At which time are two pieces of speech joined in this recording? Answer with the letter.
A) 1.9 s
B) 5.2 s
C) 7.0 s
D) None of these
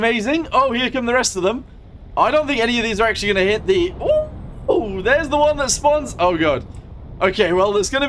D